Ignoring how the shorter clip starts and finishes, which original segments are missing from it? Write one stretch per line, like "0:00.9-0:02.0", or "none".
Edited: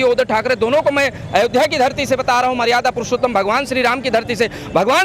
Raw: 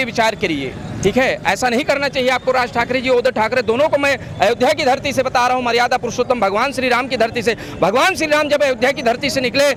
none